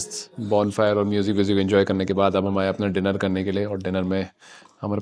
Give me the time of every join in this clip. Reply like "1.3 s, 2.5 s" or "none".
none